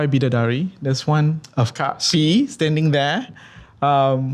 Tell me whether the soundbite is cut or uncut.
cut